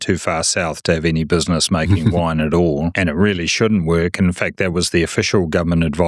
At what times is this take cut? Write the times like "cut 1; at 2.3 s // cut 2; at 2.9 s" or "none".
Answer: cut 1; at 2.9 s